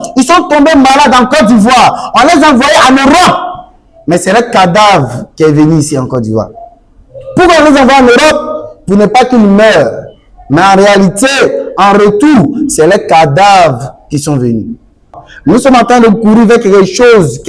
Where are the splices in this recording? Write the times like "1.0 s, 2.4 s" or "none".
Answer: 15.3 s